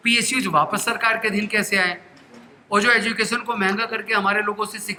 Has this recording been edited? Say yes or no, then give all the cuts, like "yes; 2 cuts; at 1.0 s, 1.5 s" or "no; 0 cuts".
no; 0 cuts